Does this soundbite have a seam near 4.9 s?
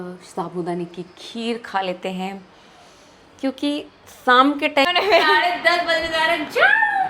yes; 1 cut; at 4.9 s

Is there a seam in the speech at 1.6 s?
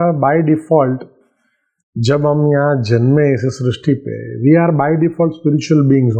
no; 0 cuts

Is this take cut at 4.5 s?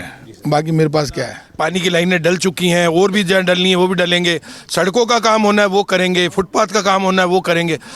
no; 1 cut; at 1.4 s

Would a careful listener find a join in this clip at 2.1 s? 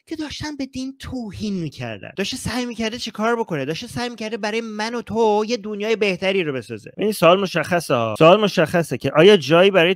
yes; 2 cuts; at 2.1 s, 6.8 s

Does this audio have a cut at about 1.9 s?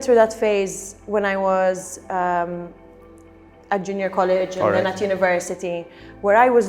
no; 0 cuts

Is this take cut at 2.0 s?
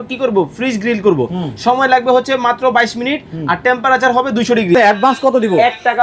no; 1 cut; at 4.7 s

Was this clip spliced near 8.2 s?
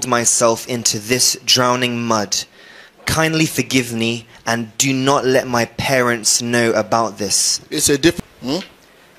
yes; 1 cut; at 8.2 s

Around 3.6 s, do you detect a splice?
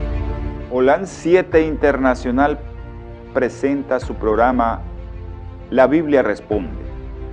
yes; 1 cut; at 3.6 s

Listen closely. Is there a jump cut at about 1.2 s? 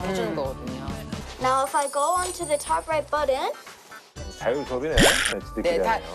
yes; 1 cut; at 1.2 s

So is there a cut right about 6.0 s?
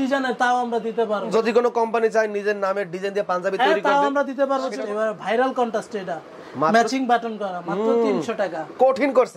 no; 2 cuts; at 1.3 s, 4.7 s

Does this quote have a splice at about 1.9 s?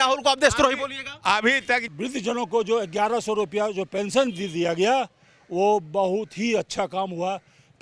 yes; 1 cut; at 1.9 s

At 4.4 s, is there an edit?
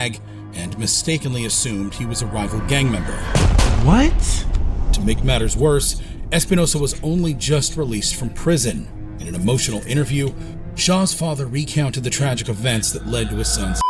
no; 0 cuts

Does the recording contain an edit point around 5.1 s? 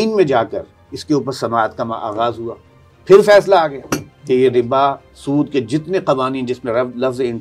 no; 0 cuts

